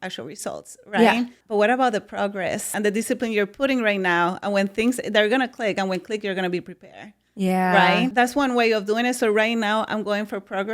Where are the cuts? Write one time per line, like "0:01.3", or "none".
0:01.4
0:02.7
0:08.1